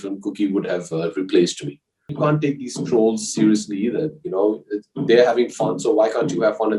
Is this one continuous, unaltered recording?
no; 1 cut; at 2.1 s

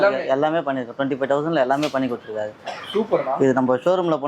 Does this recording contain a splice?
no; 0 cuts

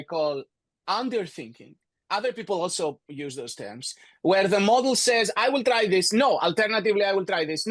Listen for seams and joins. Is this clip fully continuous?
yes; 0 cuts

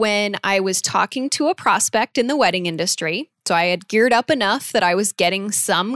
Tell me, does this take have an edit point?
no; 0 cuts

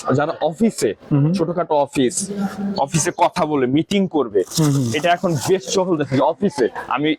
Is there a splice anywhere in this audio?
no; 0 cuts

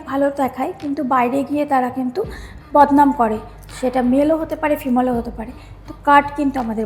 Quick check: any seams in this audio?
no; 0 cuts

